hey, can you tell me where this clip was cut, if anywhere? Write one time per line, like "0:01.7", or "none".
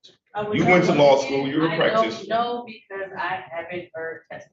none